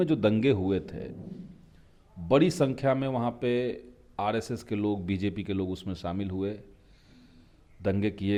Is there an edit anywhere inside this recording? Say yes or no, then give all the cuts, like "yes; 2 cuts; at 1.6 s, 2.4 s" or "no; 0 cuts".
no; 0 cuts